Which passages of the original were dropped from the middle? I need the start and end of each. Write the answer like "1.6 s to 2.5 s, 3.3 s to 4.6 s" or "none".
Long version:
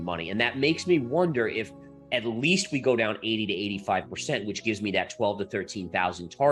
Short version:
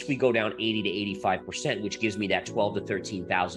none